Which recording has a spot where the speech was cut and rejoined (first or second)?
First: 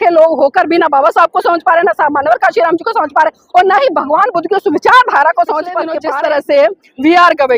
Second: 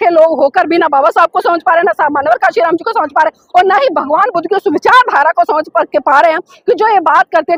first